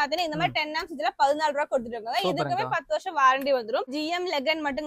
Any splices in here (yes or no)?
yes